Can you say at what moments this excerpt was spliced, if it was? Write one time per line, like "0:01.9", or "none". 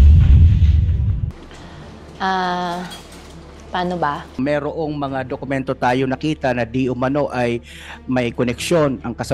0:04.2

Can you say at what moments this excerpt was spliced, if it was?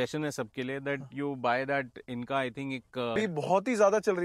0:03.2

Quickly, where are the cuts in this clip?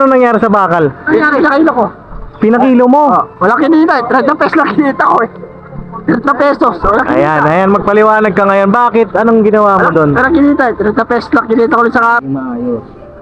0:12.2

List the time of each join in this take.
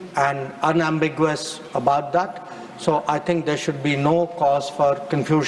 none

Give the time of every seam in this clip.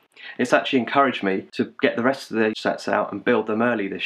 0:01.5
0:02.6

